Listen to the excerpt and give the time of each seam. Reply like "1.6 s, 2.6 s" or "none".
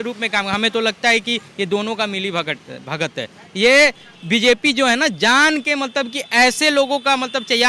none